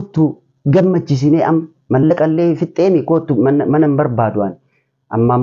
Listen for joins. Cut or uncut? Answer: uncut